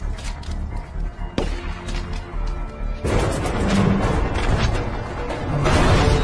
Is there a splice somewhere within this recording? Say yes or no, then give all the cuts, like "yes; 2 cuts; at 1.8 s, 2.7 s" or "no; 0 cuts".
yes; 1 cut; at 3.0 s